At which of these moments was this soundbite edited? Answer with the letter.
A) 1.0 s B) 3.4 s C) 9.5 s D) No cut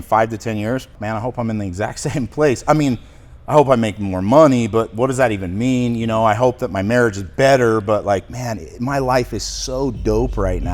A